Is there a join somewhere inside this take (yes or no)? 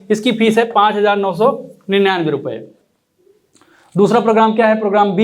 yes